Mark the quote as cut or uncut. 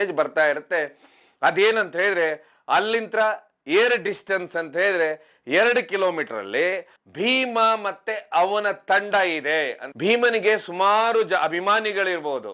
cut